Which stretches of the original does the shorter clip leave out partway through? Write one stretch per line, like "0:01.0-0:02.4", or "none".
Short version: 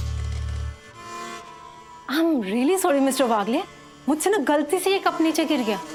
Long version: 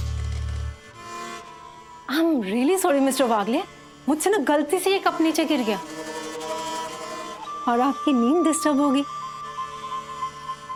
none